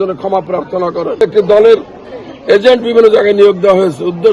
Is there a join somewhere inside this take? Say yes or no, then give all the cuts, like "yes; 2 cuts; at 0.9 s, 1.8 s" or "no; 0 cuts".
yes; 1 cut; at 1.2 s